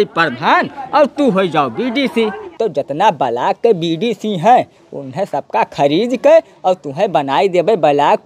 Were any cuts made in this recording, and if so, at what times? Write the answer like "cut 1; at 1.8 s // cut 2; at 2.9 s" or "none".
cut 1; at 2.4 s